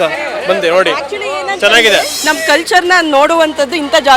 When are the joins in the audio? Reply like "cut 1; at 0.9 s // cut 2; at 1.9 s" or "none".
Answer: cut 1; at 2.1 s